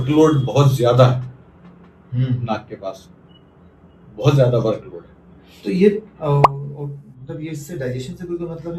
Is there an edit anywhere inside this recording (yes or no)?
no